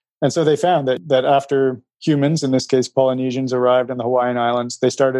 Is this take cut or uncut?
cut